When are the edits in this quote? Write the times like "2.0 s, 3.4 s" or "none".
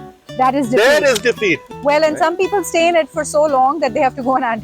1.6 s